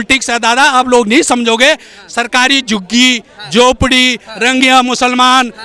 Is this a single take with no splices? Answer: yes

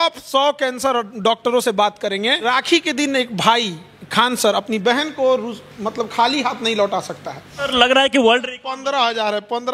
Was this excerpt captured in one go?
no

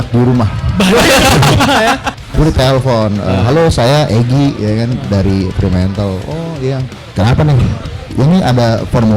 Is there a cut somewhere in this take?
yes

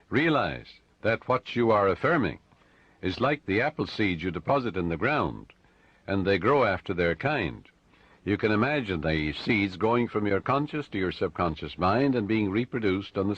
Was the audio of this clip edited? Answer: yes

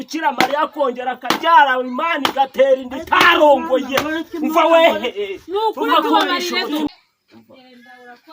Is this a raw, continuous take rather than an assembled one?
no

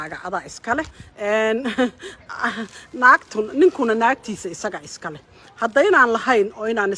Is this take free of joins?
no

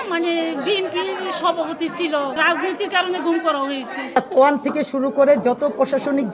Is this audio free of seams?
no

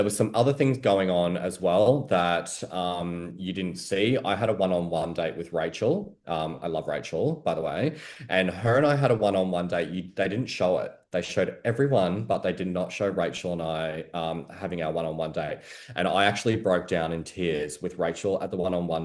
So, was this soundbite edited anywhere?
no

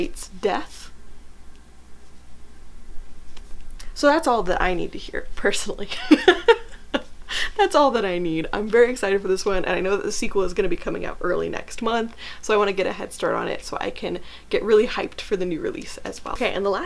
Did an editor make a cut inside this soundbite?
no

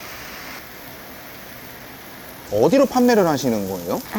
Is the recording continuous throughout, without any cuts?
yes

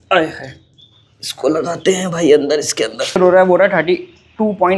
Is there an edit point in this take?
yes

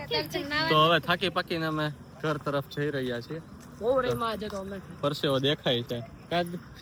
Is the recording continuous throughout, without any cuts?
yes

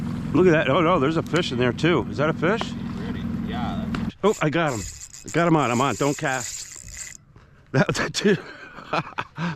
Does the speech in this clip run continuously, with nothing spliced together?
no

